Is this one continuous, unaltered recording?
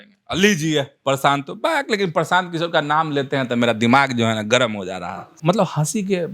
no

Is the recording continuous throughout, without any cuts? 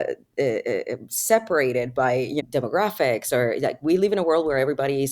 no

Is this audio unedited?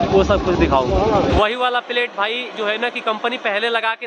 no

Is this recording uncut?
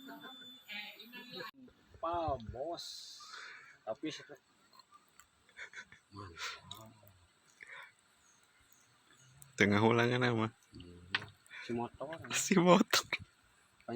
no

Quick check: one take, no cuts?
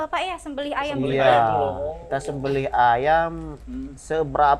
yes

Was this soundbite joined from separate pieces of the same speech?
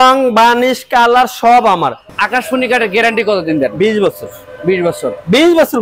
yes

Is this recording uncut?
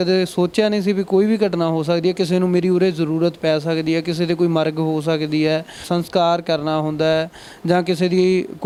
yes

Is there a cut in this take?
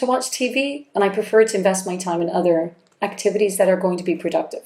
no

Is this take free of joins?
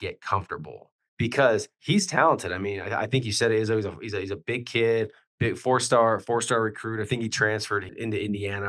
yes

